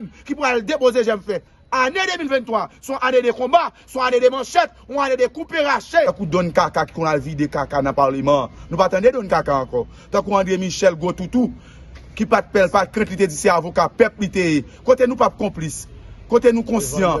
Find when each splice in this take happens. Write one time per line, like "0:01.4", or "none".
0:06.1